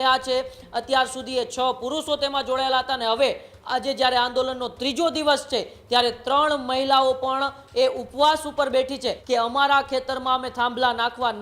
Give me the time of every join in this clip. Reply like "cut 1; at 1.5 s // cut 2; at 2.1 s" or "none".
cut 1; at 9.2 s